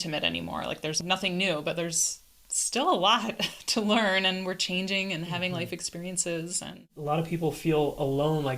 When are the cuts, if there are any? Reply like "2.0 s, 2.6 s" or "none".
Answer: 1.0 s, 6.9 s